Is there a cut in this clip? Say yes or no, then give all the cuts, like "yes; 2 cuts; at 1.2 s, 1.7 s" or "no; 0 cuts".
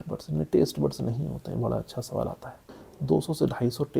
yes; 1 cut; at 2.9 s